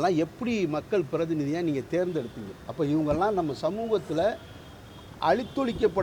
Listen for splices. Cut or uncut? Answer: uncut